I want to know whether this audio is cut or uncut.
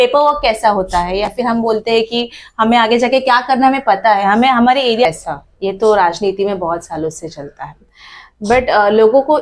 cut